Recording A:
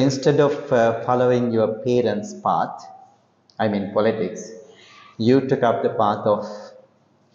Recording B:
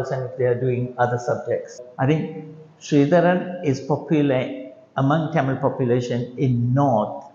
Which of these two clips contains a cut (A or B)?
B